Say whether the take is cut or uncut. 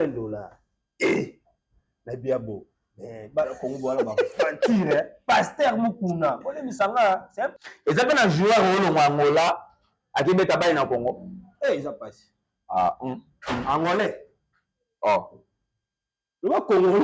cut